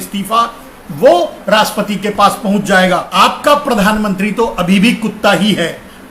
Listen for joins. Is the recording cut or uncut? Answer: cut